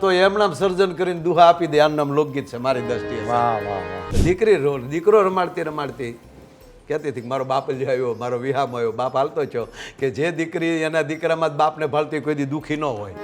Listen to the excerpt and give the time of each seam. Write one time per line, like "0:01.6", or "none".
0:04.1